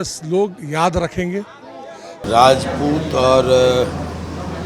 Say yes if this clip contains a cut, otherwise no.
yes